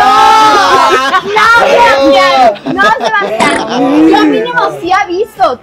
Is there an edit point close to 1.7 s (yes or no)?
no